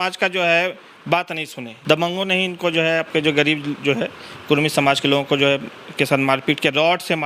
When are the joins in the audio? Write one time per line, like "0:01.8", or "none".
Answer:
0:01.7